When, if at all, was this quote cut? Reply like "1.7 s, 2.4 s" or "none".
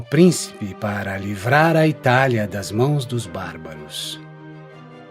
1.1 s